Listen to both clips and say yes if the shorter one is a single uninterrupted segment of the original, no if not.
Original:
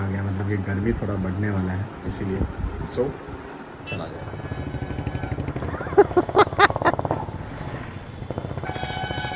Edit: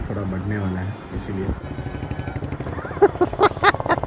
no